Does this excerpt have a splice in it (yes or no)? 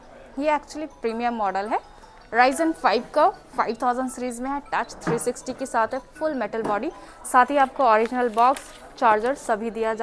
no